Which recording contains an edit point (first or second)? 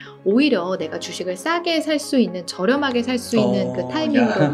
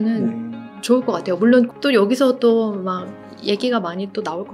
second